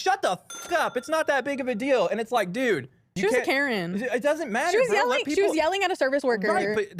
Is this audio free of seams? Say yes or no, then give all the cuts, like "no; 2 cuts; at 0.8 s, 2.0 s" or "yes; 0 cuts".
yes; 0 cuts